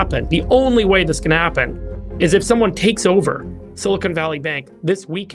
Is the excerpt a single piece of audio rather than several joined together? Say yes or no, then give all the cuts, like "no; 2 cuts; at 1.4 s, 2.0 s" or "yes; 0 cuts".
yes; 0 cuts